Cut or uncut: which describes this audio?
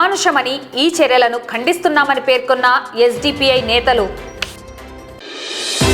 uncut